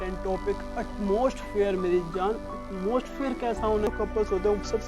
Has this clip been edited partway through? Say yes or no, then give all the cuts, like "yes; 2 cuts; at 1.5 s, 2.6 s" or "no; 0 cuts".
yes; 1 cut; at 3.9 s